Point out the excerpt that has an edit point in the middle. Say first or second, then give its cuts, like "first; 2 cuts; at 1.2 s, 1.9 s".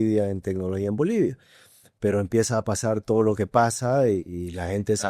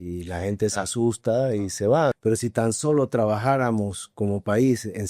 second; 1 cut; at 2.2 s